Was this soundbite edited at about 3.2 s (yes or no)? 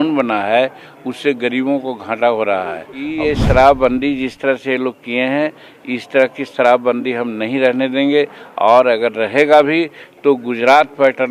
yes